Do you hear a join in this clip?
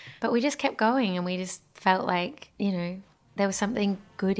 no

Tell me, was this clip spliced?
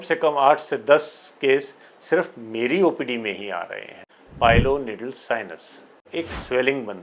yes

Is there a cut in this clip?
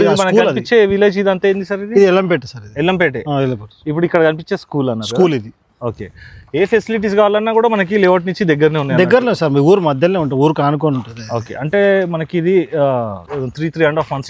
no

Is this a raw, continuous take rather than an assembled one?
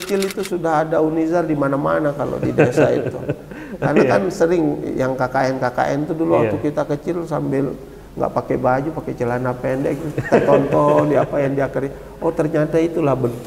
yes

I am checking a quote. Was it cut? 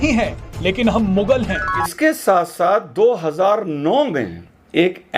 yes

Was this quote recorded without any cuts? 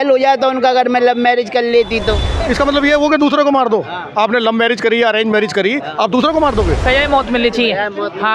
no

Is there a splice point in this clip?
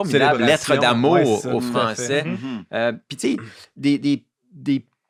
no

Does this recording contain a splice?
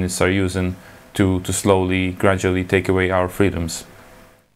no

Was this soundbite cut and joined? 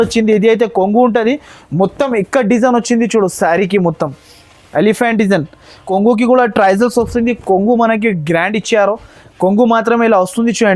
yes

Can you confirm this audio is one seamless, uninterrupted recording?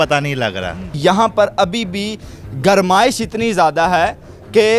no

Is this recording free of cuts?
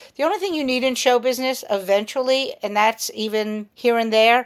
yes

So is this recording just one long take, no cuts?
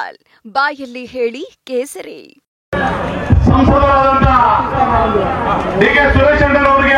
no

